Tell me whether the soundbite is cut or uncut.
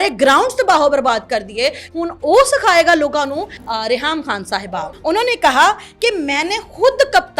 cut